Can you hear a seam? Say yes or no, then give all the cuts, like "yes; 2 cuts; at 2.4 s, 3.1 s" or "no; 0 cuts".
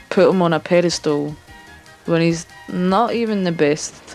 no; 0 cuts